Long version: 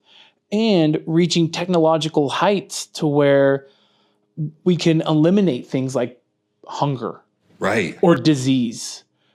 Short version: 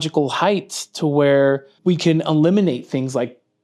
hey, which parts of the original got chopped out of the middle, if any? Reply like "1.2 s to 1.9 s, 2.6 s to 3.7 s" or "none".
3.7 s to 4.5 s